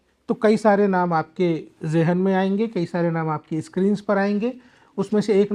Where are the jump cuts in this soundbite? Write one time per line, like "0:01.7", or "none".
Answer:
none